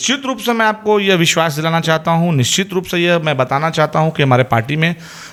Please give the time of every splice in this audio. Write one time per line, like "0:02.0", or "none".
none